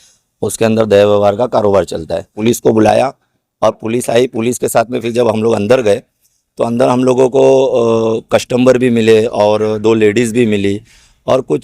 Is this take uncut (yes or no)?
no